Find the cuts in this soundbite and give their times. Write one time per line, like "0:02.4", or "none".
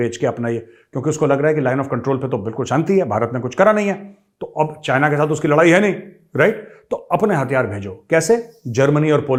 none